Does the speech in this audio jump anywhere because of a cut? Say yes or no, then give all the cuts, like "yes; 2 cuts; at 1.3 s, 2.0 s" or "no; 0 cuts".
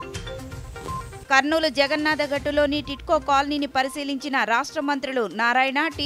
yes; 1 cut; at 1.1 s